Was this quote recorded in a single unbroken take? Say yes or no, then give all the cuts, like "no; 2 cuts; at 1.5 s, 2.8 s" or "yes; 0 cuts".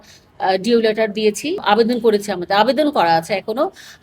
no; 1 cut; at 1.6 s